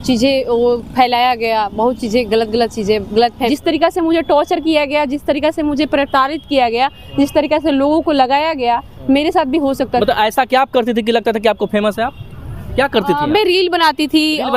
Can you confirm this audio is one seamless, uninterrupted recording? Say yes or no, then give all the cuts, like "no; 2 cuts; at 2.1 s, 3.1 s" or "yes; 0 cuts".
no; 2 cuts; at 3.5 s, 10.0 s